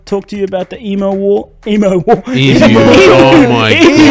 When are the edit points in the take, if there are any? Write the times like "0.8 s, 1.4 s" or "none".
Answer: none